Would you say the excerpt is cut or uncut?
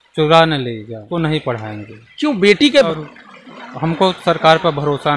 cut